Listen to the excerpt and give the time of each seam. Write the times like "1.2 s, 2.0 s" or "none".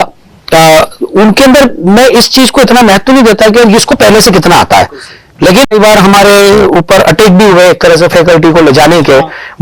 5.7 s